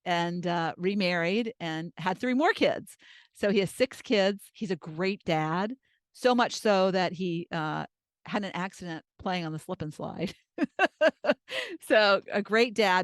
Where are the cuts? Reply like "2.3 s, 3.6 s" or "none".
9.1 s